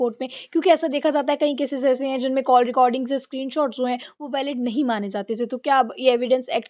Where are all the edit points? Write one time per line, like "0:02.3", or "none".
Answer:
none